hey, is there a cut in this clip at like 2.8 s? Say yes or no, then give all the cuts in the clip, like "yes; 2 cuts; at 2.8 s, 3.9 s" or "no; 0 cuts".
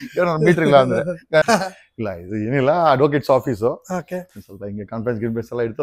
no; 1 cut; at 1.5 s